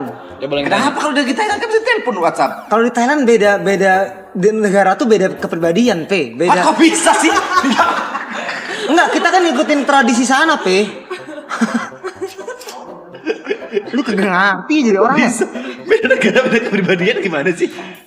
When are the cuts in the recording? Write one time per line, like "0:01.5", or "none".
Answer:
none